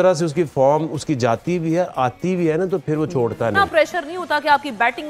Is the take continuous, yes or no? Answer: no